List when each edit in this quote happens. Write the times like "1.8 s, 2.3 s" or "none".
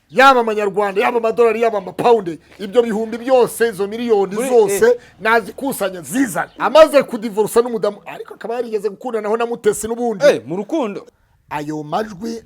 6.5 s, 11.0 s